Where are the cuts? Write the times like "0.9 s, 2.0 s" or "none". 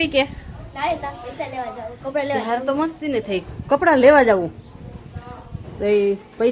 none